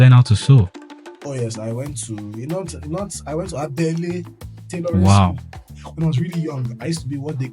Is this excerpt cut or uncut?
cut